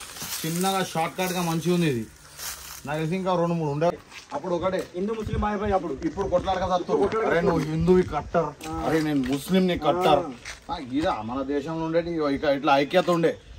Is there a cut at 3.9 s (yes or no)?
yes